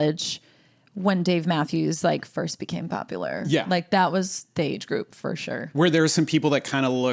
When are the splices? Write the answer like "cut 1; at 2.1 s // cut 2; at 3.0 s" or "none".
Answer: none